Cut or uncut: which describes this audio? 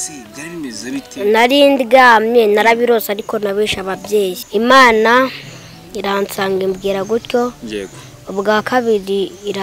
cut